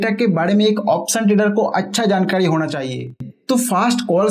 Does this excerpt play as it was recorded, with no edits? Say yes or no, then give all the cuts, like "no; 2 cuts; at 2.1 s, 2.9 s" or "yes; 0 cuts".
no; 1 cut; at 3.3 s